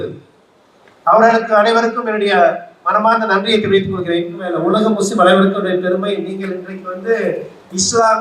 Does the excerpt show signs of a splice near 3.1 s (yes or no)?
no